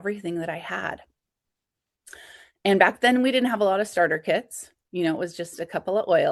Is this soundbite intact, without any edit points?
yes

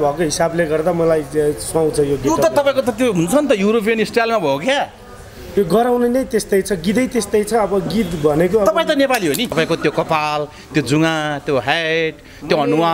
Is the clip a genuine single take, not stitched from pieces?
no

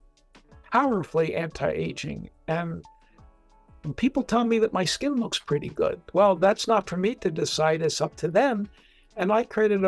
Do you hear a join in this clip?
no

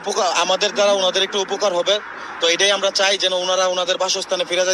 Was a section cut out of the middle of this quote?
yes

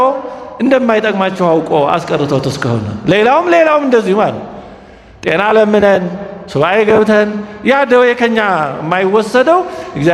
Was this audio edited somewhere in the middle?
no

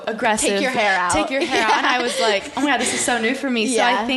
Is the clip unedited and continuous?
yes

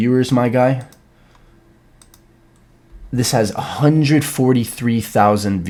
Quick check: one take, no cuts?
yes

